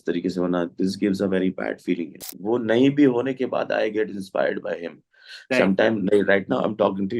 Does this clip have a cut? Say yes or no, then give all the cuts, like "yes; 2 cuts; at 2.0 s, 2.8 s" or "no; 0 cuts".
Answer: yes; 1 cut; at 2.2 s